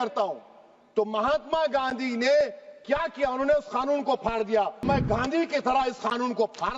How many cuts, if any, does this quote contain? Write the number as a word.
one